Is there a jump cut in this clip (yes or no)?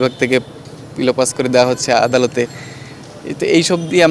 no